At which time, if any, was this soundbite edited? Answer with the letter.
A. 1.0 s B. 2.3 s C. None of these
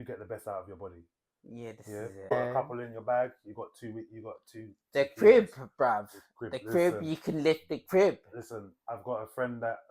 B